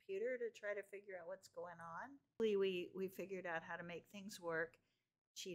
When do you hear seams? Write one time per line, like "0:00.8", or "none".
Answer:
0:02.4

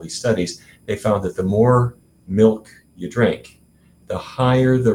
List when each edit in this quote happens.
none

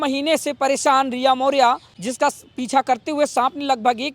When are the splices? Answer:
0:02.0

